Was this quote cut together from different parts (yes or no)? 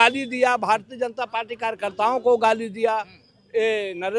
no